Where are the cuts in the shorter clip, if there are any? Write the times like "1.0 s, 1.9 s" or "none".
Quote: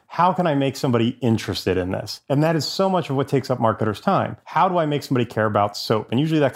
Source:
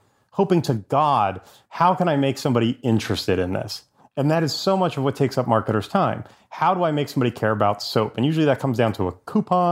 2.1 s, 4.4 s